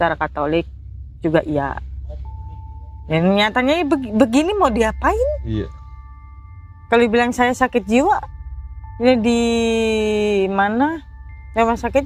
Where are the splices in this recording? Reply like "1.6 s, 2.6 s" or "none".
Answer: none

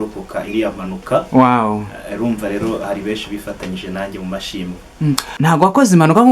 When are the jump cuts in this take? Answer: 5.4 s

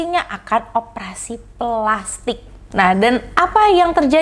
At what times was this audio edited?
2.5 s

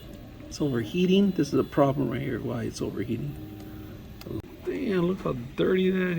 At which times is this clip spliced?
4.4 s

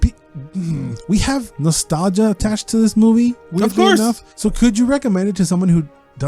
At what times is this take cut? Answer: 1.0 s, 4.3 s

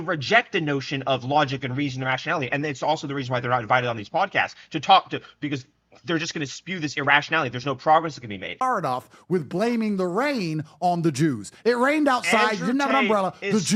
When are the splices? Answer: 8.6 s

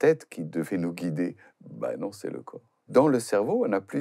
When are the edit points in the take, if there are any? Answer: 2.8 s

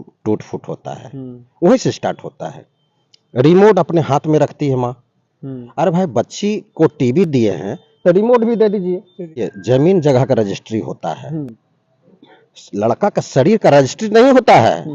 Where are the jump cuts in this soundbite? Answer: 9.5 s

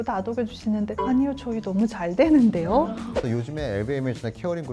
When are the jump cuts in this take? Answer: 3.4 s

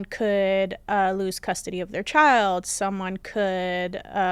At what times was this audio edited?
none

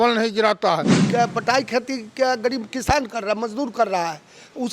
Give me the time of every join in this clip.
0.9 s

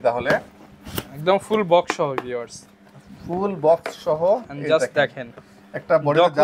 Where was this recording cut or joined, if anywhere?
none

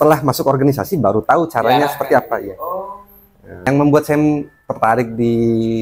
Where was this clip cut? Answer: 3.7 s

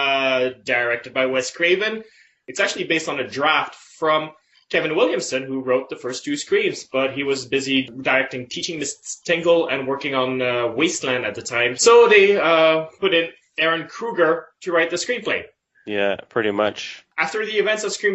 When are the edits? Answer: none

